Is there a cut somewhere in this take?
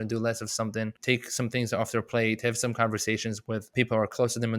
yes; 2 cuts; at 1.0 s, 3.7 s

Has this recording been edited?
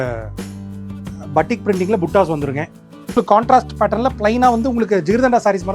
yes; 1 cut; at 3.2 s

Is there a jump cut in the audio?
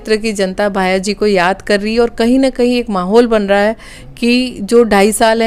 no; 0 cuts

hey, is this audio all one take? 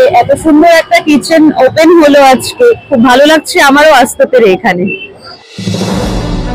yes; 0 cuts

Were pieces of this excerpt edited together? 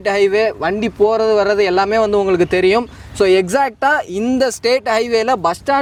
no; 0 cuts

